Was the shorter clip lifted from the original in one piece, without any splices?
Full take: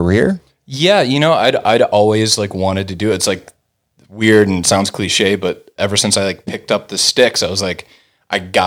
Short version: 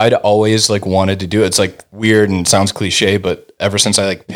no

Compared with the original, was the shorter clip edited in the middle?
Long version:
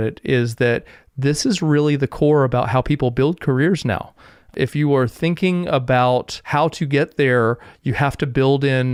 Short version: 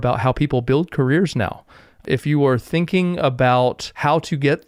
no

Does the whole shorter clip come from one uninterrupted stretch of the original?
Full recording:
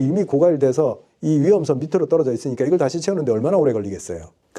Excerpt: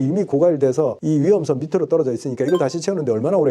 no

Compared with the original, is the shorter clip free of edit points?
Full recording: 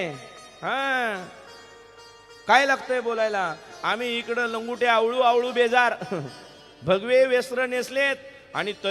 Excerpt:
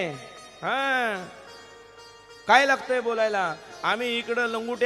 yes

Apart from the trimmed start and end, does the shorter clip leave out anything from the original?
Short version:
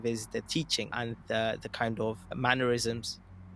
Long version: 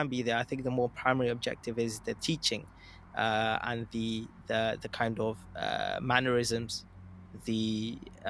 yes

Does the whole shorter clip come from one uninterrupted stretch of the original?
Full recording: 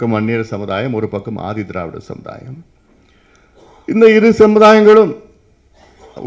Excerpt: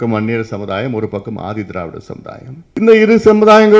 no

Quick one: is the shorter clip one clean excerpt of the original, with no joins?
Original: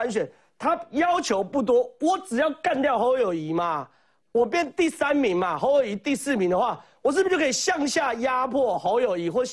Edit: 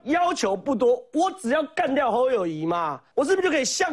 no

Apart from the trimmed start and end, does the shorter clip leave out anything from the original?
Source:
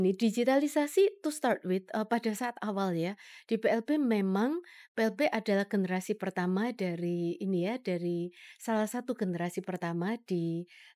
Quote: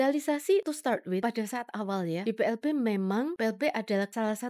yes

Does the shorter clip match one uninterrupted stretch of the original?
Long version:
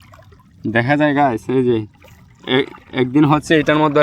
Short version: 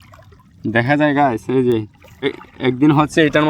no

